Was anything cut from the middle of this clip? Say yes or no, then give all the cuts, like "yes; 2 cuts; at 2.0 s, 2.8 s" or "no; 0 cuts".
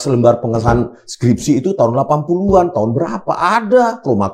no; 0 cuts